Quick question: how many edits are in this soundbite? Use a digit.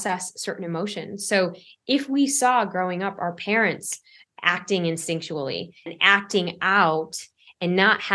1